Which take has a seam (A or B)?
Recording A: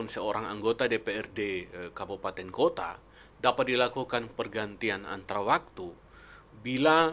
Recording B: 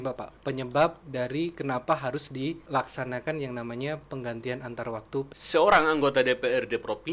B